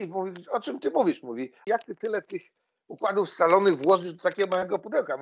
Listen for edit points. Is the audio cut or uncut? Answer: cut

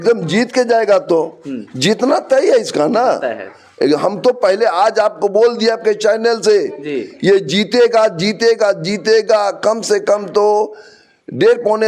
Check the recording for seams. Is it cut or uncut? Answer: uncut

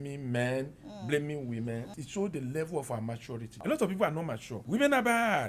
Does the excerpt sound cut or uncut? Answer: cut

